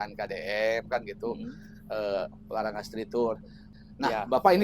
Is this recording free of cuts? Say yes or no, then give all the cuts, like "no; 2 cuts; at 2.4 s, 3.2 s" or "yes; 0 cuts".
no; 1 cut; at 3.7 s